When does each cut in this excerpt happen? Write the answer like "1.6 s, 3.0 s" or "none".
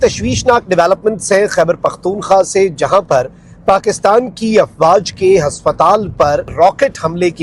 6.5 s